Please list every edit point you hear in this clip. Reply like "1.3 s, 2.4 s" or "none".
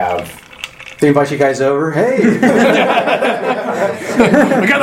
none